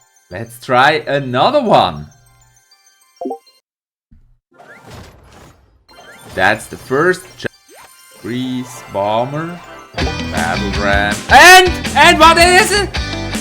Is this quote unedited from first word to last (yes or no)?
no